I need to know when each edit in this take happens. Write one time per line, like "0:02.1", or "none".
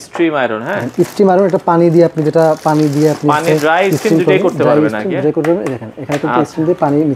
none